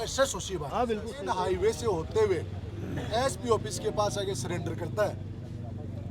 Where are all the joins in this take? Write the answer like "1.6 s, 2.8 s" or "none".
1.2 s